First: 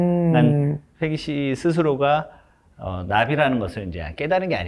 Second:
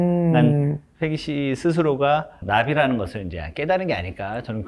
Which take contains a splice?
second; 1 cut; at 2.3 s

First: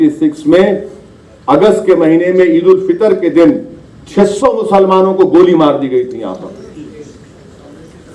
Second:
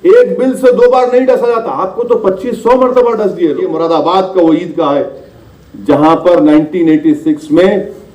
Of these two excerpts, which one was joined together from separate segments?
second; 1 cut; at 3.7 s

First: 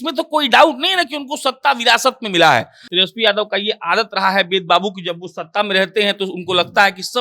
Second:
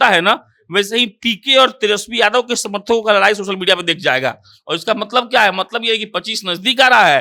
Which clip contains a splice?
first; 1 cut; at 2.8 s

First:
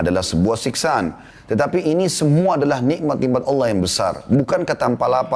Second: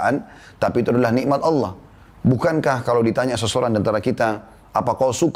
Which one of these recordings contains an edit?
first; 1 cut; at 1.3 s

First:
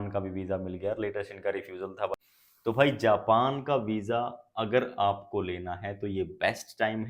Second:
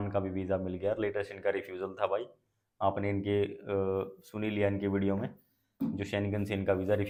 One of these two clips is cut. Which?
first; 1 cut; at 2.1 s

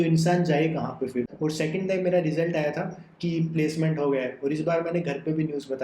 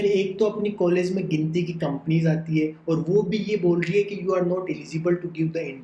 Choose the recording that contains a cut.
first; 1 cut; at 1.3 s

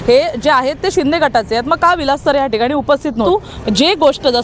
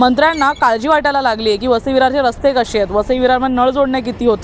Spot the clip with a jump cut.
first; 1 cut; at 3.3 s

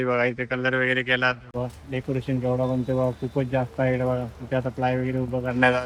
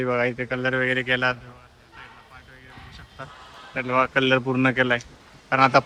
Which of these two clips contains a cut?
first; 1 cut; at 1.4 s

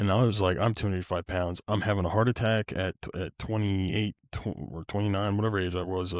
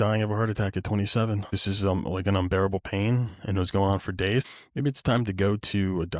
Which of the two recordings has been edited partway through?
second; 2 cuts; at 1.5 s, 4.5 s

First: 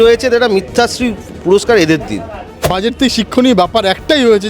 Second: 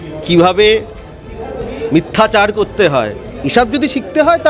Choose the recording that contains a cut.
first; 1 cut; at 2.7 s

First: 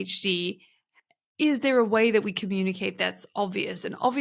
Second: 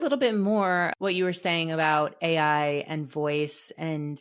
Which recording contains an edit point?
second; 1 cut; at 0.9 s

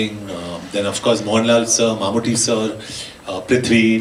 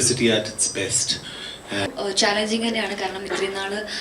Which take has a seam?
second; 1 cut; at 1.9 s

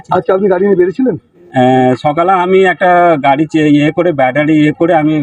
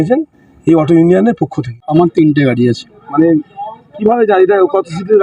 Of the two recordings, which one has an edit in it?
second; 1 cut; at 1.8 s

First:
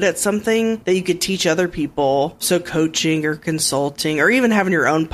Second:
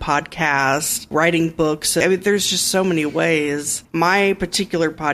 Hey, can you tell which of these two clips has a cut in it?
second; 3 cuts; at 1.1 s, 2.0 s, 3.8 s

